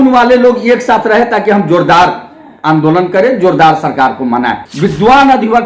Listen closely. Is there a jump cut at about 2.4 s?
no; 1 cut; at 4.6 s

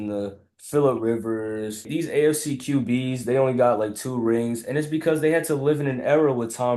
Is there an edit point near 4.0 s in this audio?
no; 1 cut; at 1.9 s

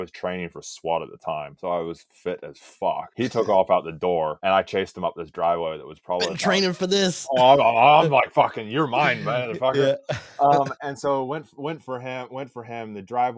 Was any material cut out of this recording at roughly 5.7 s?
no; 3 cuts; at 1.5 s, 3.1 s, 4.4 s

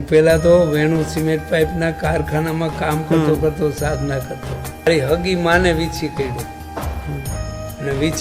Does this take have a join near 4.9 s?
yes; 1 cut; at 4.9 s

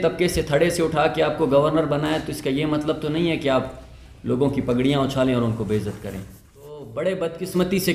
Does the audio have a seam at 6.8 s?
yes; 1 cut; at 6.8 s

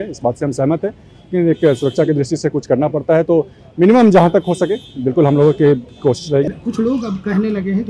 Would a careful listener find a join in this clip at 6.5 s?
yes; 1 cut; at 6.5 s

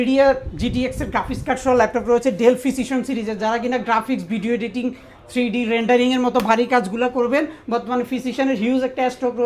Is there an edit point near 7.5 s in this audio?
no; 0 cuts

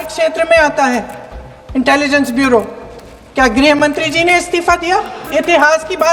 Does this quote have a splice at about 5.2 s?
yes; 1 cut; at 5.2 s

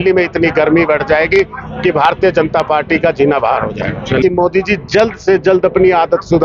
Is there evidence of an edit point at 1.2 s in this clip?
no; 1 cut; at 4.2 s

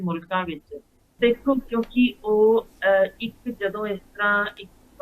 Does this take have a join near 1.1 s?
yes; 1 cut; at 1.1 s

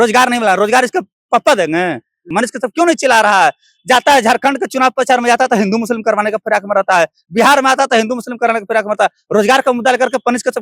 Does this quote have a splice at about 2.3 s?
yes; 1 cut; at 2.3 s

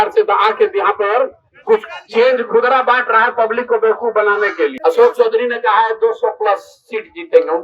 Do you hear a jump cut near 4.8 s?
yes; 1 cut; at 4.8 s

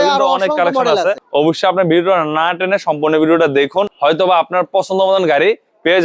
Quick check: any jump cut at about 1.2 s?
yes; 2 cuts; at 1.2 s, 3.9 s

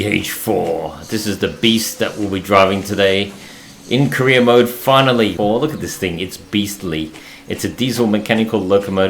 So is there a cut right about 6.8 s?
no; 1 cut; at 5.3 s

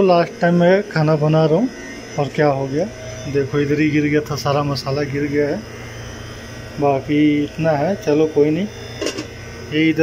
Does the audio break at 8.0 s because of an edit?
no; 0 cuts

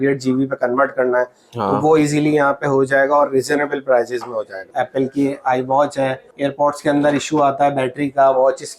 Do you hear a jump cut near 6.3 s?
yes; 2 cuts; at 4.7 s, 6.3 s

